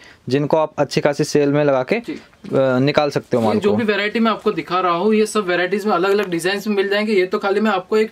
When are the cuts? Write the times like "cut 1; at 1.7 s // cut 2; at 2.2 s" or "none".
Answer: none